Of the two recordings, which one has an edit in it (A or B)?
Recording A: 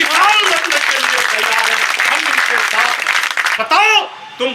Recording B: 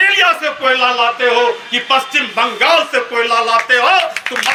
A